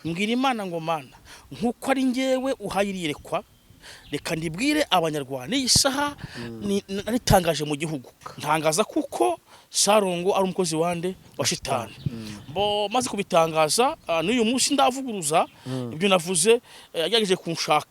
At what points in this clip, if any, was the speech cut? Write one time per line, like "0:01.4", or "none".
0:08.2